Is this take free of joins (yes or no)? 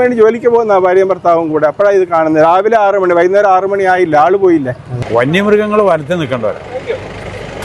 no